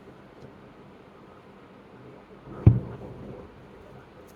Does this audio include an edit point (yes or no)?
no